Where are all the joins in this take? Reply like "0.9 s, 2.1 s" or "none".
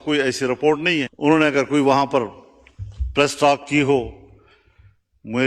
1.1 s